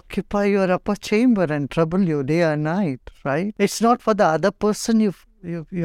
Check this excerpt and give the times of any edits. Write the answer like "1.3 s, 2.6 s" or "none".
3.5 s